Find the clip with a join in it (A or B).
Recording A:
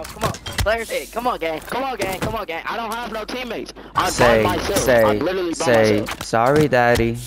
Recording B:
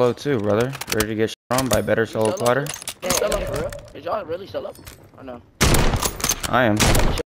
B